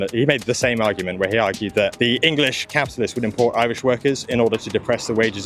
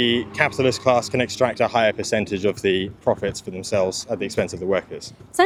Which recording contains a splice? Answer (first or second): first